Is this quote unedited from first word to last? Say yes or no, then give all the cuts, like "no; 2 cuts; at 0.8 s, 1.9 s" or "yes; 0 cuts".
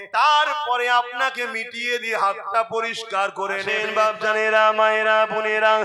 no; 1 cut; at 3.8 s